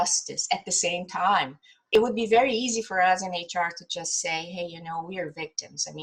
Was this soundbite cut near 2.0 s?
yes; 1 cut; at 2.0 s

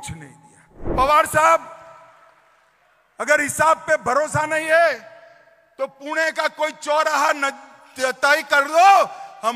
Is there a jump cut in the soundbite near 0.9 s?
yes; 1 cut; at 0.9 s

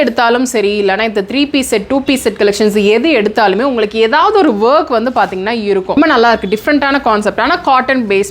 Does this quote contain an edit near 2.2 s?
no; 1 cut; at 6.0 s

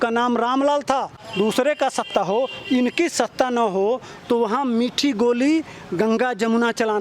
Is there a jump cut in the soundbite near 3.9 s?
no; 1 cut; at 1.2 s

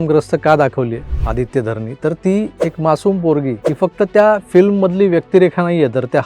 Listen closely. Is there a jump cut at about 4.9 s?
no; 3 cuts; at 1.1 s, 2.6 s, 3.6 s

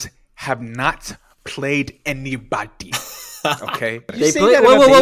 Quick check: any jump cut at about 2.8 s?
no; 1 cut; at 4.1 s

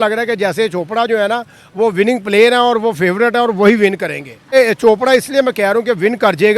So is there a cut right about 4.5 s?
yes; 1 cut; at 4.5 s

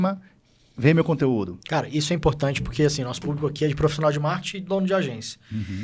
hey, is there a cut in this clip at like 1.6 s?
no; 0 cuts

